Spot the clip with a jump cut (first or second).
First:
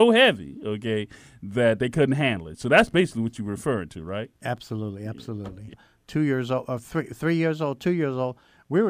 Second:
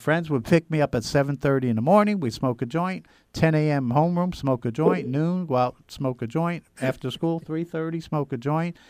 first